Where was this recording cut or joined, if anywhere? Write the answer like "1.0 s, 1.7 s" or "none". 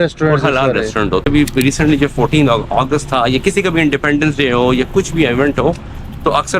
1.2 s